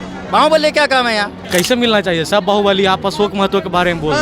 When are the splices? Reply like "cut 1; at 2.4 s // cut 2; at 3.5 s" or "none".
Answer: cut 1; at 1.3 s